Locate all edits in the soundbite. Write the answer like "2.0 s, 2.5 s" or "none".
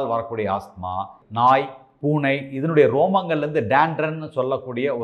1.2 s